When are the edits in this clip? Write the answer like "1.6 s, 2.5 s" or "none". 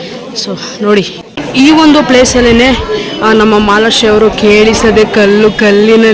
1.4 s